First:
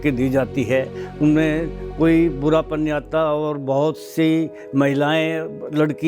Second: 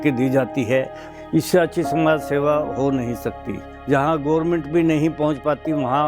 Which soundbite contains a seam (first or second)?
second